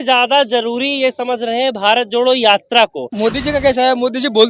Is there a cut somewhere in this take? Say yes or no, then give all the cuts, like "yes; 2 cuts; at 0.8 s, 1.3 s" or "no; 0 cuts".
yes; 1 cut; at 3.0 s